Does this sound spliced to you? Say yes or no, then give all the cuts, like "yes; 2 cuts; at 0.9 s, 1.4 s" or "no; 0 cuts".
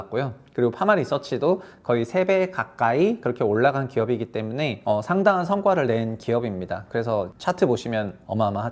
yes; 1 cut; at 7.3 s